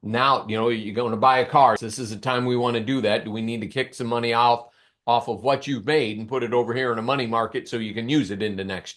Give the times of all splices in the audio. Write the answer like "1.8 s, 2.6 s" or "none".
1.9 s